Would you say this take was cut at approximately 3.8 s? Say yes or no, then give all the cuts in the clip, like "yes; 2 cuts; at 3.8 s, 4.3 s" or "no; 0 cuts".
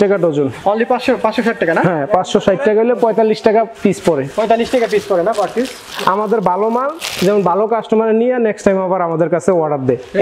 no; 1 cut; at 5.9 s